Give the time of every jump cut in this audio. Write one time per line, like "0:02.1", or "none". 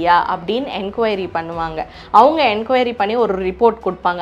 0:02.0